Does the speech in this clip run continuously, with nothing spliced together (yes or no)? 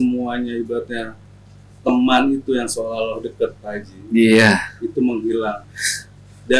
yes